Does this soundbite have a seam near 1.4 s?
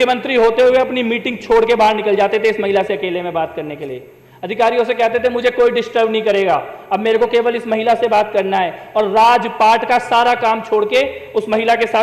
no; 0 cuts

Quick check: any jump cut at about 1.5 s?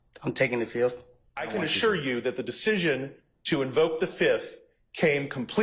yes; 1 cut; at 1.5 s

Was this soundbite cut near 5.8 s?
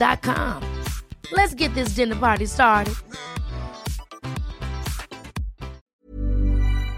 yes; 1 cut; at 5.8 s

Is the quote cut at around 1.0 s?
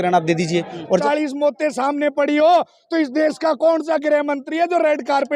yes; 1 cut; at 1.0 s

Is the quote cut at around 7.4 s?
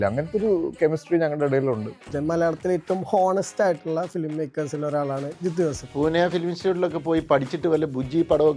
no; 2 cuts; at 2.1 s, 5.9 s

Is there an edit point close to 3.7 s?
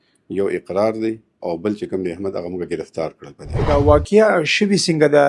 yes; 1 cut; at 3.7 s

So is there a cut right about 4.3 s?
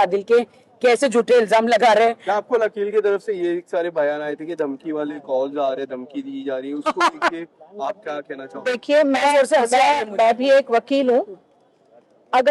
no; 1 cut; at 2.7 s

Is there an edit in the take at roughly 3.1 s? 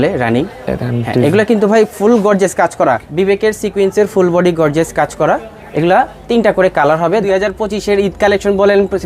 yes; 2 cuts; at 3.1 s, 7.2 s

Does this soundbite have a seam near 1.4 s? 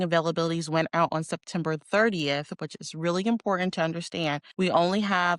no; 1 cut; at 4.4 s

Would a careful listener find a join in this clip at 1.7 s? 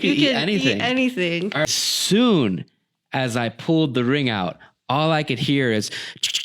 yes; 1 cut; at 1.7 s

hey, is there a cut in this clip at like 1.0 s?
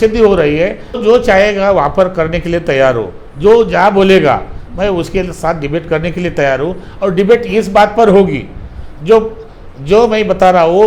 yes; 1 cut; at 1.0 s

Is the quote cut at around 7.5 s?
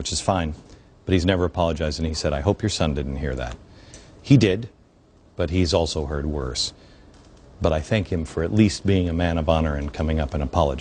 yes; 1 cut; at 7.5 s

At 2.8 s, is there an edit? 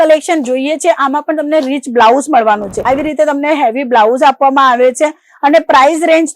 yes; 1 cut; at 2.8 s

